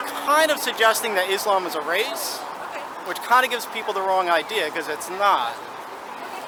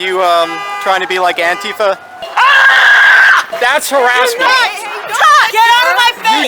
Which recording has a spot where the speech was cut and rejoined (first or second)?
second